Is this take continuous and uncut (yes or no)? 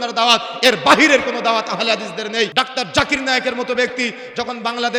no